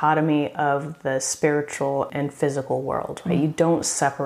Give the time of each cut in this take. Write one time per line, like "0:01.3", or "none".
0:02.1